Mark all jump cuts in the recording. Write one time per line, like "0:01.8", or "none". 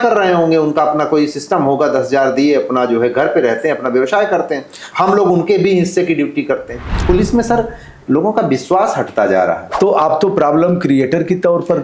0:07.0
0:09.7